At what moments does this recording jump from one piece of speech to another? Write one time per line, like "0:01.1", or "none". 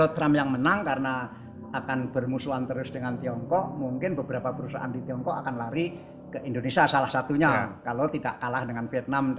none